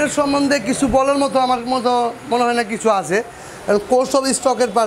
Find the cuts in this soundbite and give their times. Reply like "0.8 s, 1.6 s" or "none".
none